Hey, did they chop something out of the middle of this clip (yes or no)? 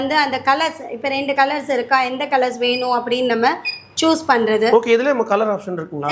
no